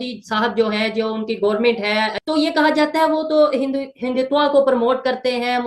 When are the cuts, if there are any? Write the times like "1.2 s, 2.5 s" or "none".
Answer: none